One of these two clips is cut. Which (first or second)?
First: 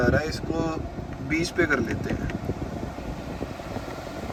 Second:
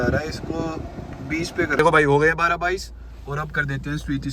second